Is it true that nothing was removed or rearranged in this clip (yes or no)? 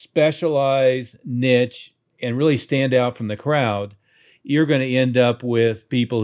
yes